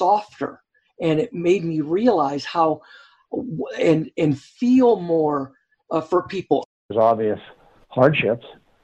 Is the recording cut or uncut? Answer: cut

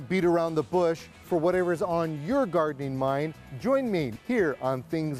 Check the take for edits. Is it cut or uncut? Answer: cut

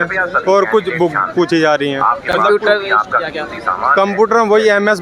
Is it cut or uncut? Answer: uncut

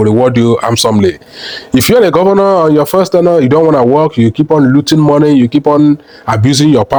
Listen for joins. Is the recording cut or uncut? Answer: uncut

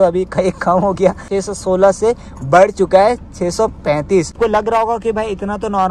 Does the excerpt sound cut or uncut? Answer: cut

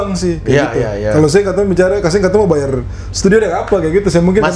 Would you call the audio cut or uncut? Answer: uncut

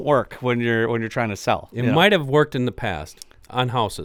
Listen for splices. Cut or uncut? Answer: uncut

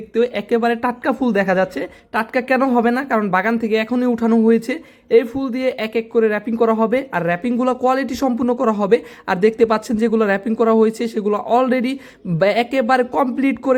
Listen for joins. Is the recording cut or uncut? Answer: uncut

